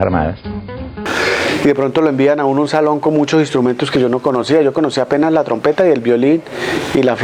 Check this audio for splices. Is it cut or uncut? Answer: cut